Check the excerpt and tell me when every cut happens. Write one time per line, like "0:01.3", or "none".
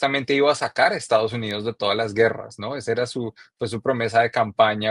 none